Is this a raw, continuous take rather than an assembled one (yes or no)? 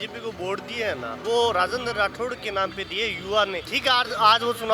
no